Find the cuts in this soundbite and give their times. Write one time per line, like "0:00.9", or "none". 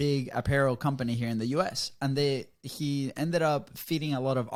none